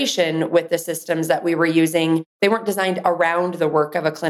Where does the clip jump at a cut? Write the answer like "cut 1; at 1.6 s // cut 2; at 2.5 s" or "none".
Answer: cut 1; at 2.3 s